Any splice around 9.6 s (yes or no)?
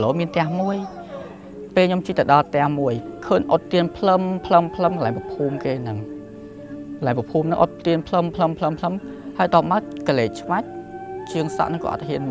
no